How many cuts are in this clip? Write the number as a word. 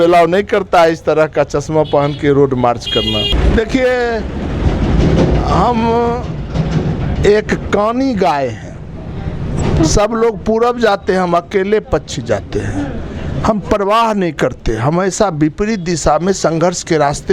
one